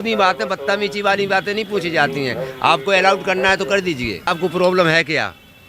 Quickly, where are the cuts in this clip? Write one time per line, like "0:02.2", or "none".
0:04.2